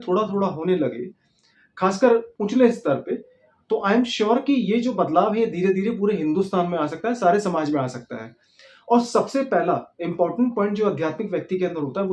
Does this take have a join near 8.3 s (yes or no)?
no